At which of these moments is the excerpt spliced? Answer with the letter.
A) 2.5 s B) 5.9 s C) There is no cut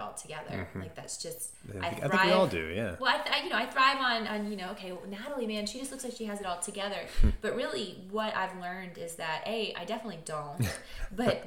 C